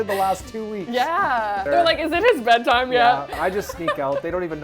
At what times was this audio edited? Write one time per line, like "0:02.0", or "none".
0:01.7
0:03.4

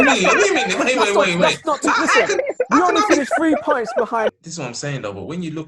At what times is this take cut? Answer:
0:04.4

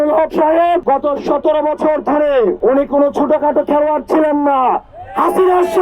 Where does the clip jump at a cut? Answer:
0:00.8
0:02.6

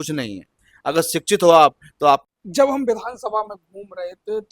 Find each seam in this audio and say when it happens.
0:02.3

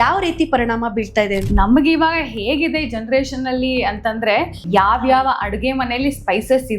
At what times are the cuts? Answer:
0:01.5
0:04.6

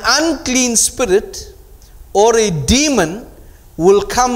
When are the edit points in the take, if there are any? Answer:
none

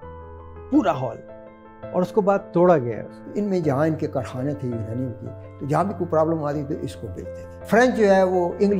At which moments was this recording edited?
0:03.1
0:07.5

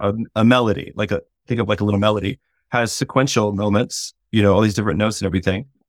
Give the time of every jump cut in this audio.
none

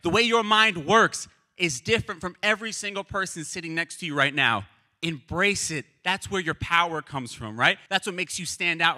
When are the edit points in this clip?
0:07.8

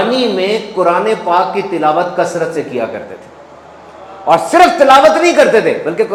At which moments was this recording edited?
none

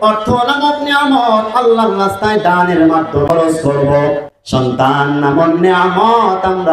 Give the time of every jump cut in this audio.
0:03.3
0:04.3

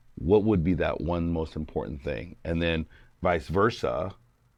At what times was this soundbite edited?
none

